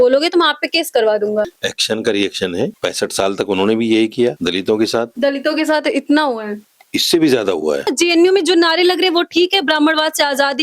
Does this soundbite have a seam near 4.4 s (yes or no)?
yes